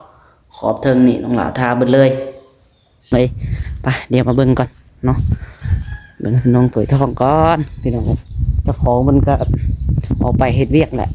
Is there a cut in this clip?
yes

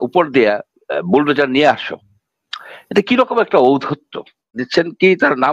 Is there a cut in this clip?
yes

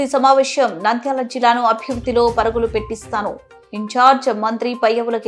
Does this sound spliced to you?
no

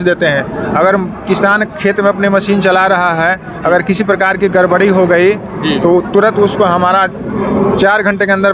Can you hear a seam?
no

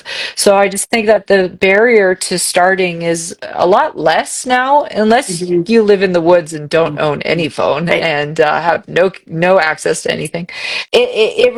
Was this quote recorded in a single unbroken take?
yes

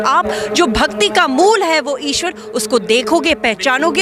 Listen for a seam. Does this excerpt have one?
no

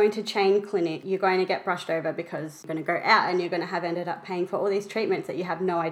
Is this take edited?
yes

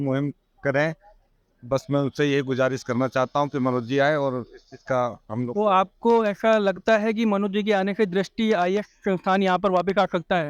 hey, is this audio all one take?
yes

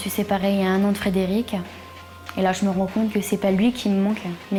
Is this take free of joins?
yes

